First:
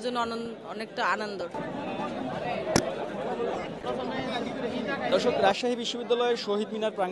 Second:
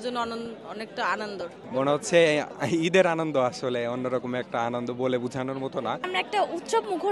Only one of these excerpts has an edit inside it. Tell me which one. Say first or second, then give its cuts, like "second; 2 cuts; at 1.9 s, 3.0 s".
second; 2 cuts; at 1.6 s, 6.0 s